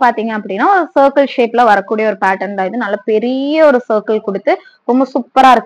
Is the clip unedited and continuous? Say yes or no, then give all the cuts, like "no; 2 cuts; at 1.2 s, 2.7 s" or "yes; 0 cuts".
yes; 0 cuts